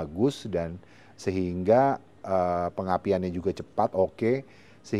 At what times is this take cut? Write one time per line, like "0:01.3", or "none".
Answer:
none